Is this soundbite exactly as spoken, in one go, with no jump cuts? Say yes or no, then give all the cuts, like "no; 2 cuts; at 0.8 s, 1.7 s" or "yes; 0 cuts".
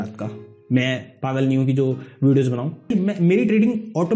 no; 1 cut; at 2.9 s